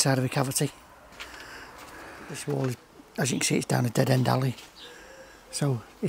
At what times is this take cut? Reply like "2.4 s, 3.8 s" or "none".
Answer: 2.4 s